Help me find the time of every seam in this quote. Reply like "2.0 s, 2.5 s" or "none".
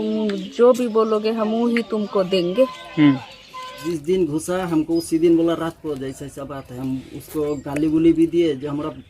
3.8 s